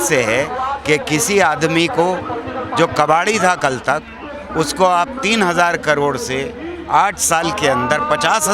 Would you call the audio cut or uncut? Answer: uncut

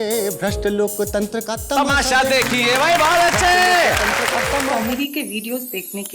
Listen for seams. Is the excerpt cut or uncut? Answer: cut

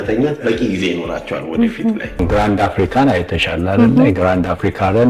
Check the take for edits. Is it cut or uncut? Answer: cut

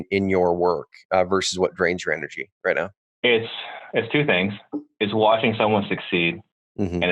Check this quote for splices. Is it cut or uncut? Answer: cut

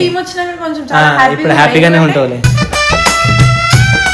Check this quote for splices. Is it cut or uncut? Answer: uncut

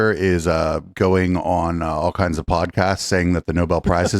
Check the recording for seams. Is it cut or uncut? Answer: uncut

